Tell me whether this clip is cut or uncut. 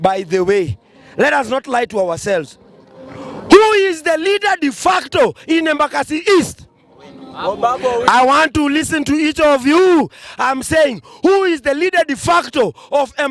uncut